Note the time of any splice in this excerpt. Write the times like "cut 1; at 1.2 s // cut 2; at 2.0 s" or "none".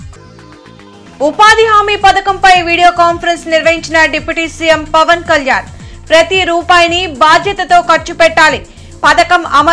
cut 1; at 1.0 s